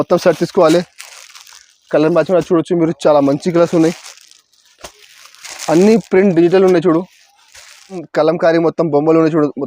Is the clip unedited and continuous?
no; 1 cut; at 8.0 s

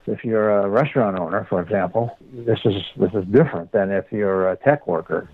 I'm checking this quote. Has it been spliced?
no; 0 cuts

